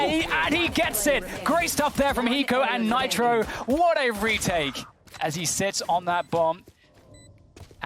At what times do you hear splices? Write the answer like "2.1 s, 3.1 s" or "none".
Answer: 5.1 s